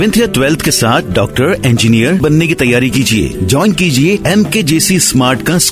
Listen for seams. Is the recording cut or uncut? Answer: uncut